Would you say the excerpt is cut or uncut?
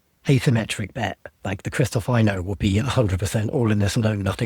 cut